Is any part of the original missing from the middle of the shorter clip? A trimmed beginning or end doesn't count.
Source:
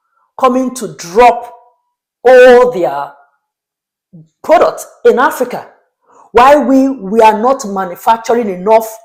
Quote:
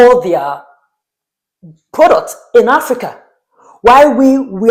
no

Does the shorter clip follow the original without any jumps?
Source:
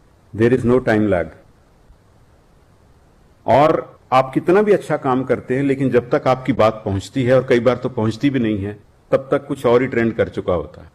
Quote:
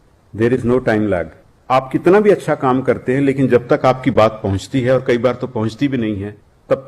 no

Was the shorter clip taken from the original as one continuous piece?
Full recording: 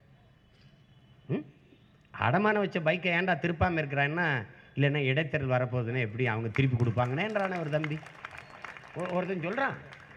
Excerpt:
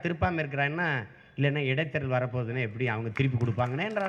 yes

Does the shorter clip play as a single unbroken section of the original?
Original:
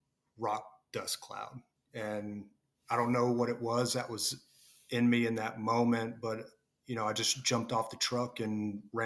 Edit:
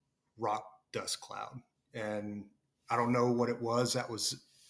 yes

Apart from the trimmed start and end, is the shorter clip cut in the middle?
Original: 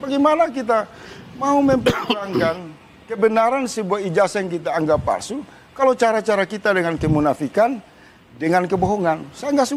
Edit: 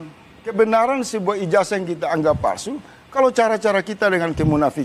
no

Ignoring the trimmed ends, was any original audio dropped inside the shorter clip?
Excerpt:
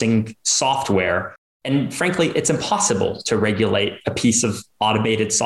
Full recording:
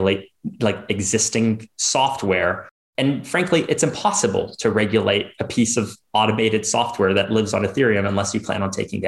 no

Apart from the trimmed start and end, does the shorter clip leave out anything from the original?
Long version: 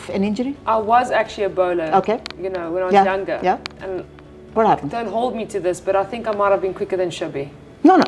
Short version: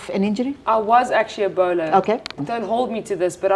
yes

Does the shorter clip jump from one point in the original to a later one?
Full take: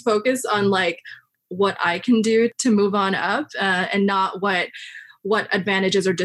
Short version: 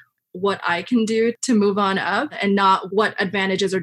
yes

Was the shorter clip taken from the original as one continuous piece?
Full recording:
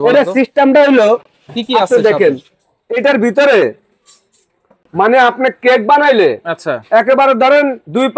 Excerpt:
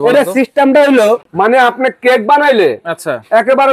no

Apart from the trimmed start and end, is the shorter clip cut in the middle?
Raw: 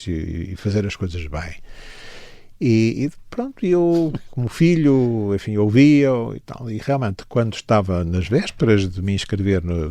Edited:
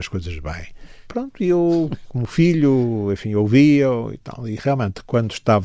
yes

